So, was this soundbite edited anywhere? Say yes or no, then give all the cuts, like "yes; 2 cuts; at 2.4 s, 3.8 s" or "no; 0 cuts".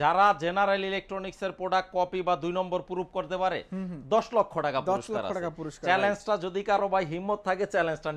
no; 0 cuts